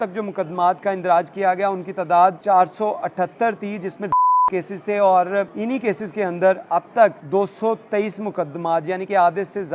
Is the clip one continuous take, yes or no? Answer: no